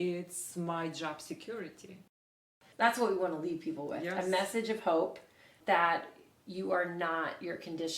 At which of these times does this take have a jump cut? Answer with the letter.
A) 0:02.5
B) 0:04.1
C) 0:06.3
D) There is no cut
A